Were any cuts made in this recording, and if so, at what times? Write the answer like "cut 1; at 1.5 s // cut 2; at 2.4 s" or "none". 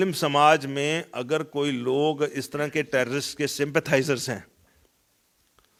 none